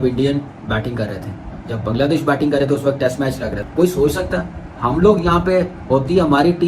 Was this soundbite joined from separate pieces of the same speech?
yes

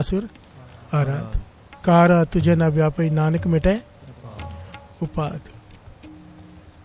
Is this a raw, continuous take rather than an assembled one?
yes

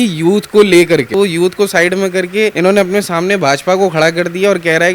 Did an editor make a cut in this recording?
yes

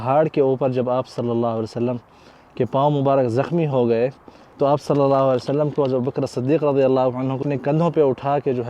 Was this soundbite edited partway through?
yes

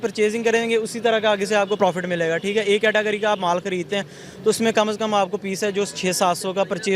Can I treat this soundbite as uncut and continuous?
yes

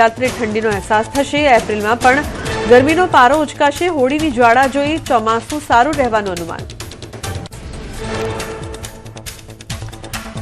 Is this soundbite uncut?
no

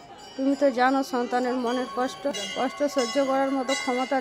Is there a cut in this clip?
yes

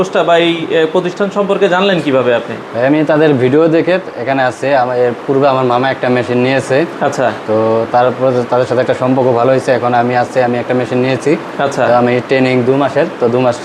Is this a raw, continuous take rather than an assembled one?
yes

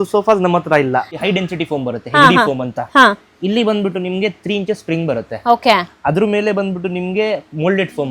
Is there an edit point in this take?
yes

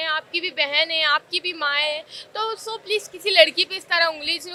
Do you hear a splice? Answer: no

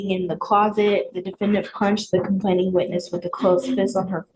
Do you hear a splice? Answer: no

